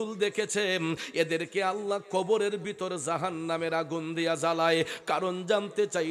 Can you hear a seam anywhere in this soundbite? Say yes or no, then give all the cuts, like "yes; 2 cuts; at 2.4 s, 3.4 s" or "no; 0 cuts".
no; 0 cuts